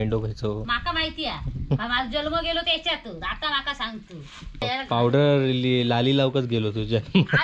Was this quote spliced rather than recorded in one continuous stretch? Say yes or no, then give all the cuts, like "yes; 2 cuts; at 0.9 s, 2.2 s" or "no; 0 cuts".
yes; 1 cut; at 4.6 s